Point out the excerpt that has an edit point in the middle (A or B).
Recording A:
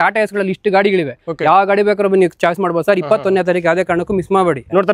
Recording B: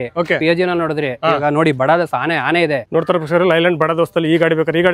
B